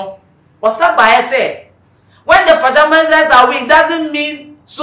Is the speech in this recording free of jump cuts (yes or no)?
yes